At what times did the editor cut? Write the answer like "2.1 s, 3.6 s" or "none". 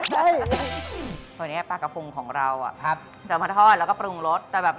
1.2 s

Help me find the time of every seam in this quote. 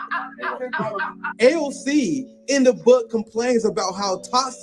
2.4 s

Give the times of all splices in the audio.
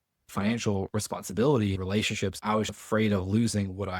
2.4 s

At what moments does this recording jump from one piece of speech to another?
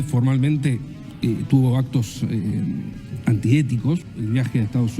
4.1 s

